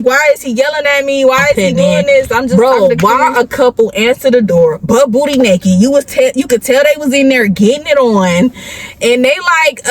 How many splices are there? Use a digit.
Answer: 1